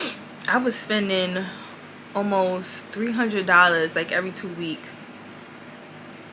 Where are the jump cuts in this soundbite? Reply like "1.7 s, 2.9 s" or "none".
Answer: none